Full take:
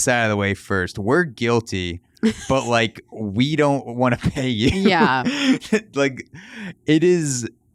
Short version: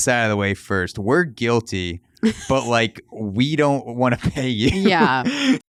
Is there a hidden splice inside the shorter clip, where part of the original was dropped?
no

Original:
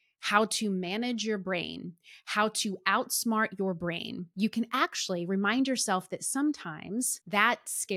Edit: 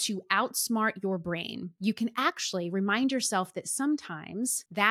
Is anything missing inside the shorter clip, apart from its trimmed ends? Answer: no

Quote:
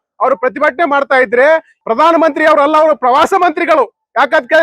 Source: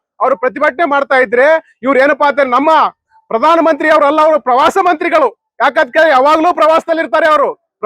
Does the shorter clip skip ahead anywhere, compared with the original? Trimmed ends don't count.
yes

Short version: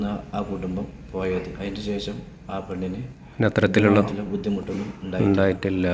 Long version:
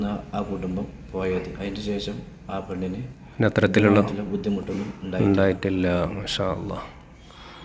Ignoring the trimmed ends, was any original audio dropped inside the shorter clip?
no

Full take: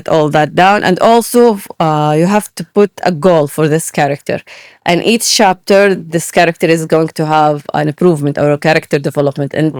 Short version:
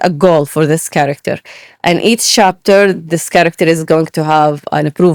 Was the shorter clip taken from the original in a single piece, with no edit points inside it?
yes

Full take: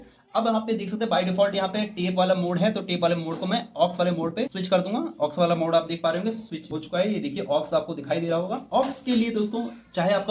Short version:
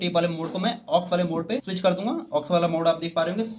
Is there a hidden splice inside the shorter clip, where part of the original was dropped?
no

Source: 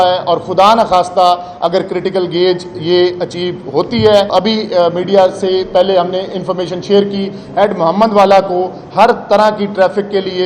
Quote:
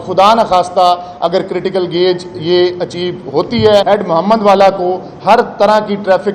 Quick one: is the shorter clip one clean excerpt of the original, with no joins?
no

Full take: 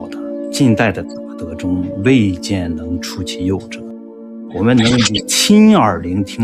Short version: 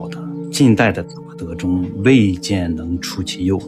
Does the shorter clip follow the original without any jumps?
yes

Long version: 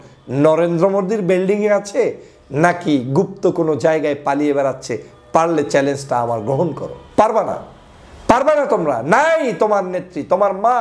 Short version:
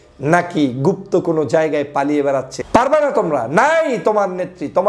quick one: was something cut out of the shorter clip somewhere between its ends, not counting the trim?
yes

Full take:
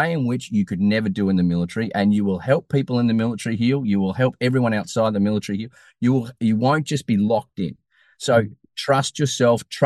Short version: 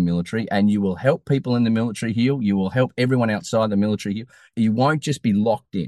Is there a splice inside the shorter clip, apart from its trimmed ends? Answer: yes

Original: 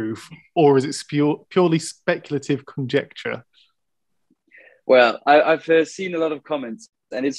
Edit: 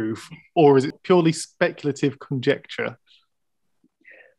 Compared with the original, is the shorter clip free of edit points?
no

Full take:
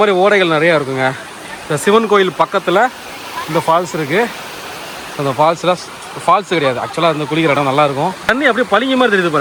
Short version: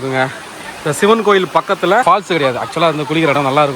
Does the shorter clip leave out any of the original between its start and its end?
yes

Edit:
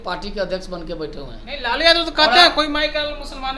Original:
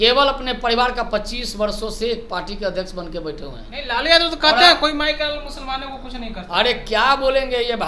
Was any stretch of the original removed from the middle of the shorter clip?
no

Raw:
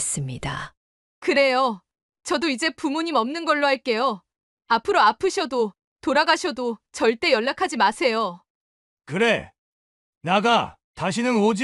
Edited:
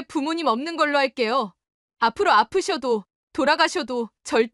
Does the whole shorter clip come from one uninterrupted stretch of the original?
yes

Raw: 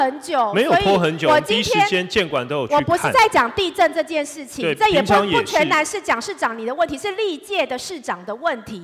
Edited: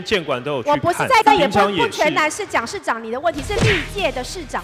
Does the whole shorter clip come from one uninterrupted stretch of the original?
no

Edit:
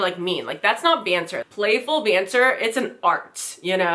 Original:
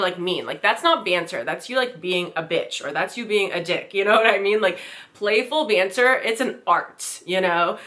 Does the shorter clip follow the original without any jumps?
no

